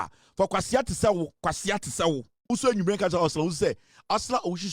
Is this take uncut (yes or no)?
no